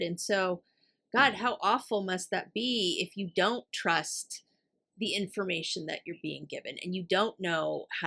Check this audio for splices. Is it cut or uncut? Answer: uncut